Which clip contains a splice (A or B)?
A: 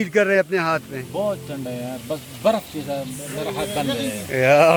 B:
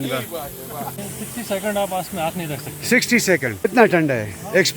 B